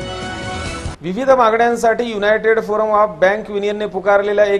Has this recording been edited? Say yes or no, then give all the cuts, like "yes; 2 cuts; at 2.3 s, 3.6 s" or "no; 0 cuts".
yes; 1 cut; at 0.9 s